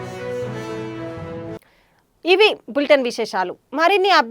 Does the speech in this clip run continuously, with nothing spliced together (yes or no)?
yes